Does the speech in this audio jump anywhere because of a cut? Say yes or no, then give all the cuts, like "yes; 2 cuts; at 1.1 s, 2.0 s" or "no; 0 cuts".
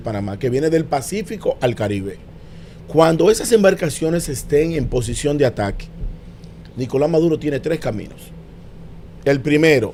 no; 0 cuts